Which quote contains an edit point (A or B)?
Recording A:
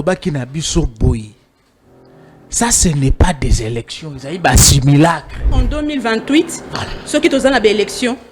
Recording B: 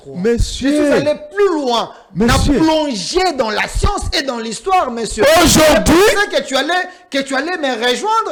A